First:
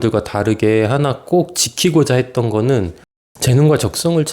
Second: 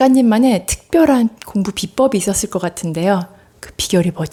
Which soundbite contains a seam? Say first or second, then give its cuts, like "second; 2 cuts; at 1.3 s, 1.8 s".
first; 1 cut; at 3.3 s